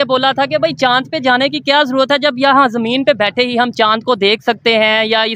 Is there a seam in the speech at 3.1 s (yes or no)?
no